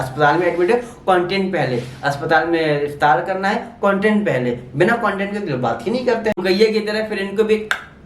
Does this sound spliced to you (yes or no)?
yes